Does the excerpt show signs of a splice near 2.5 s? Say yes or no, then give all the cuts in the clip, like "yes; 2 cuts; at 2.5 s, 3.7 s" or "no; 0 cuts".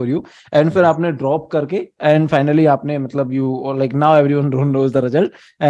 no; 0 cuts